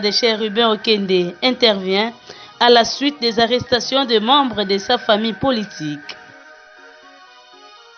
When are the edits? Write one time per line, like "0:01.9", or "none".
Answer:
0:06.1